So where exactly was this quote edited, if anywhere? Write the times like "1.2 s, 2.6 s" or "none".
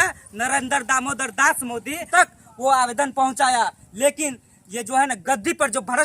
2.0 s

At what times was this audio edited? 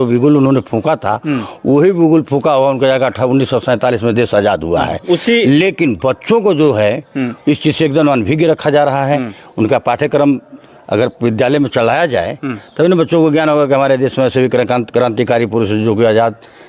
none

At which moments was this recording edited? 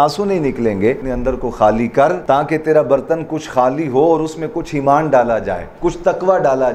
1.1 s, 2.2 s, 5.6 s

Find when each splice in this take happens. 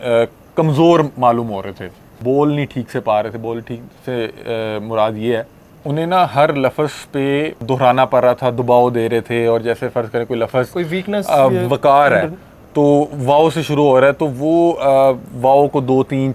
2.2 s, 5.9 s, 7.6 s

